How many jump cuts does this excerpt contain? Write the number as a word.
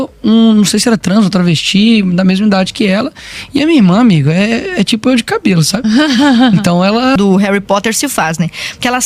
one